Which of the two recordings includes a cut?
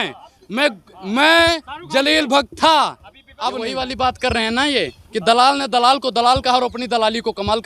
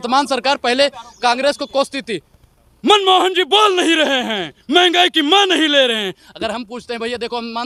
first; 1 cut; at 3.7 s

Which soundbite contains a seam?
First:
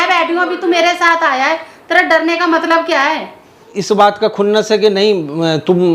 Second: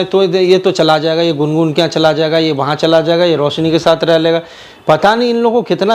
first; 1 cut; at 3.7 s

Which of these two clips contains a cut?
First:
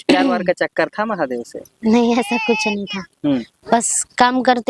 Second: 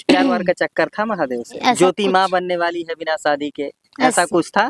second; 1 cut; at 1.6 s

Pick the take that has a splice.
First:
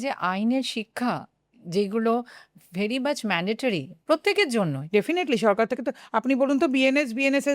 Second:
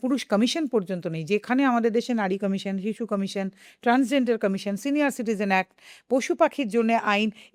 first; 1 cut; at 4.8 s

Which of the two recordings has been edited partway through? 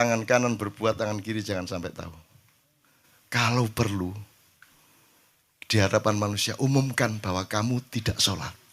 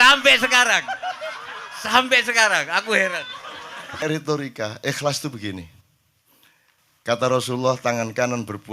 second; 1 cut; at 4.0 s

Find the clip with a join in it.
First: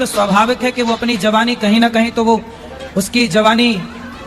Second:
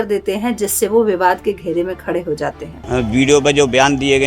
second; 1 cut; at 2.8 s

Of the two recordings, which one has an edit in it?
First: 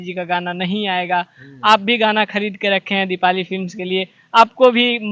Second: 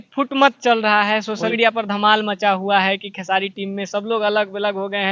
second; 1 cut; at 1.5 s

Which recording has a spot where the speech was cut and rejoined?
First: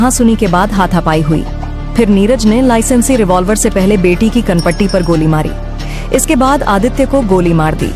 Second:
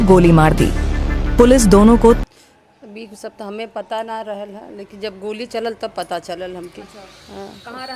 second; 1 cut; at 2.2 s

